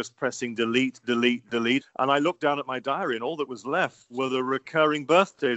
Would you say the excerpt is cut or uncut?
cut